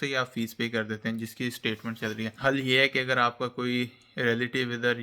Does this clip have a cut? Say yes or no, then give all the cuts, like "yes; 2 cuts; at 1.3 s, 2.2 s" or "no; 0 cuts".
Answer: yes; 1 cut; at 2.3 s